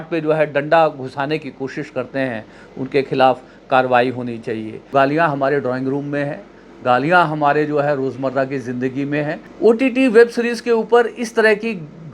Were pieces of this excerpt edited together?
yes; 2 cuts; at 4.9 s, 9.4 s

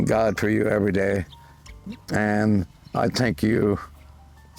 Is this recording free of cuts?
yes; 0 cuts

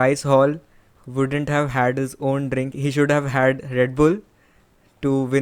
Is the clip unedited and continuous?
no; 1 cut; at 2.8 s

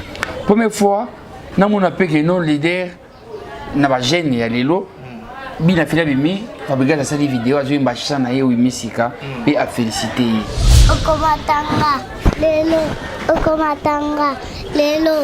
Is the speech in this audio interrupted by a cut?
yes; 1 cut; at 10.7 s

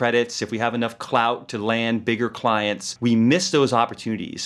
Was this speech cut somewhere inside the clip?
no; 0 cuts

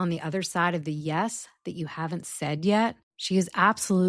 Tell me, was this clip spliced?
yes; 1 cut; at 3.1 s

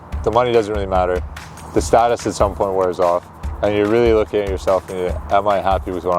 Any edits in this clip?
no; 0 cuts

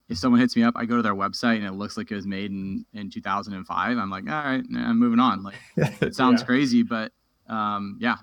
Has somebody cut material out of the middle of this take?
no; 0 cuts

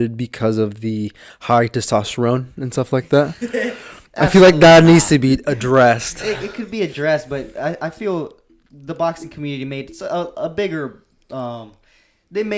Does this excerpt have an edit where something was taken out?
no; 0 cuts

